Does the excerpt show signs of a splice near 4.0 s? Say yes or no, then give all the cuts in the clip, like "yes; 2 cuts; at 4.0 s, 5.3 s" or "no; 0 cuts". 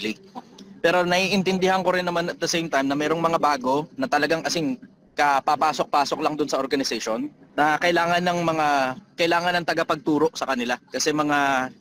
no; 1 cut; at 7.4 s